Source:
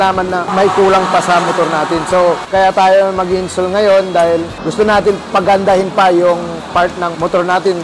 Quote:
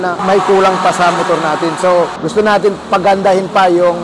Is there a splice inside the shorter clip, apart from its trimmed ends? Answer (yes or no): yes